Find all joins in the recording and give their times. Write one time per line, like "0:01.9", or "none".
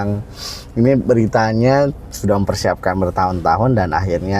none